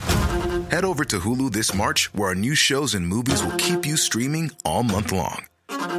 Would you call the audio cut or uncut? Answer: uncut